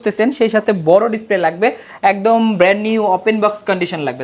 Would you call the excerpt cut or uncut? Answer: uncut